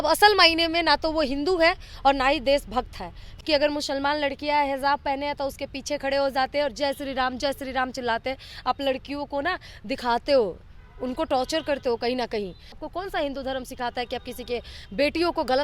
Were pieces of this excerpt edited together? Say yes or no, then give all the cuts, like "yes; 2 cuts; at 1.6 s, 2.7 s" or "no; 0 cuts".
yes; 2 cuts; at 3.3 s, 12.8 s